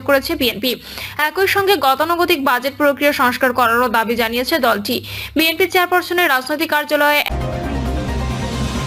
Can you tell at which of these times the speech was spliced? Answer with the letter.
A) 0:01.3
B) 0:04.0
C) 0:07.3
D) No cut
C